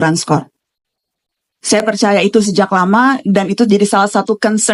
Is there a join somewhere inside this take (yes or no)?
no